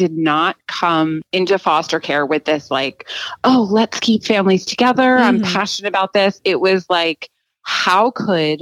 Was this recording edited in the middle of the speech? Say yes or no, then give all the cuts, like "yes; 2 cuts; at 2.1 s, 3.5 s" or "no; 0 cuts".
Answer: yes; 1 cut; at 1.2 s